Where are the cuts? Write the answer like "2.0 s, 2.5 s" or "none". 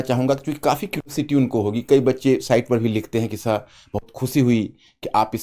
none